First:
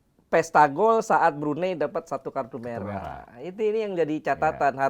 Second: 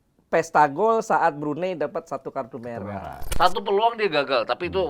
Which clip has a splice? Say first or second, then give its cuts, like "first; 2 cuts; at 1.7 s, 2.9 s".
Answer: second; 1 cut; at 3.2 s